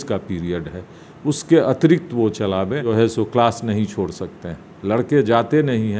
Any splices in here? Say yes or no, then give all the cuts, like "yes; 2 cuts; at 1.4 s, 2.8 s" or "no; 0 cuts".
yes; 1 cut; at 2.9 s